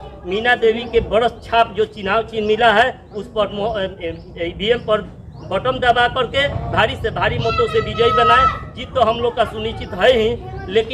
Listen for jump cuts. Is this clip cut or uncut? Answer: uncut